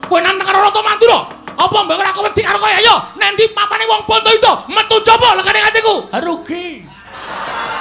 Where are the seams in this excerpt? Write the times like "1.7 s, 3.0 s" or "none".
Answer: none

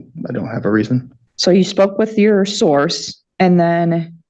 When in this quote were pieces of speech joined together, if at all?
1.2 s

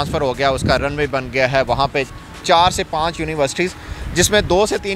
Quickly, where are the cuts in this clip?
none

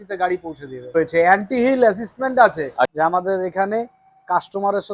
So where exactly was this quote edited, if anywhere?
0.9 s, 2.9 s

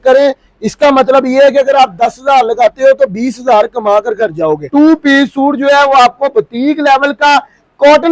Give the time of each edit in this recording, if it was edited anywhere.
4.6 s

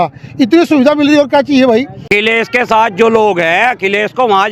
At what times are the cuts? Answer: 2.1 s

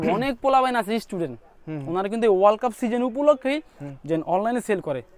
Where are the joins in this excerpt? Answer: none

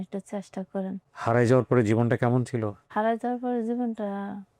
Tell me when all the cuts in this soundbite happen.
1.0 s, 2.9 s

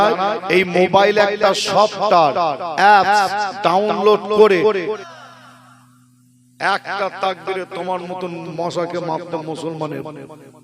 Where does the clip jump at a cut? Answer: 4.9 s

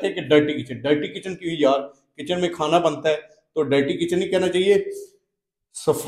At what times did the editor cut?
none

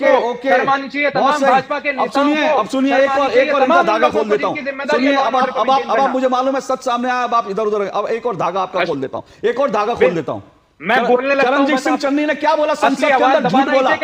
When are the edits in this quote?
none

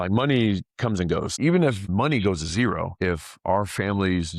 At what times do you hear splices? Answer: 1.3 s

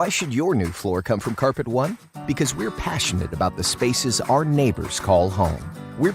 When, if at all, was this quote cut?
1.0 s

